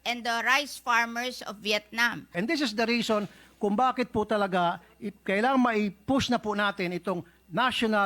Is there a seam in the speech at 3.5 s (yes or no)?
no